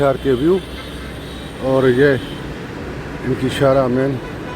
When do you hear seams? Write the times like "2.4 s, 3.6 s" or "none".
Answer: none